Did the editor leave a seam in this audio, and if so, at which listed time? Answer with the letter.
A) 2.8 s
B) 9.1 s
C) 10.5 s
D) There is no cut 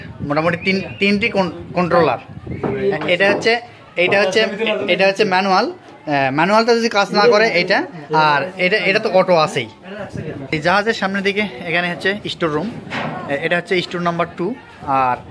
C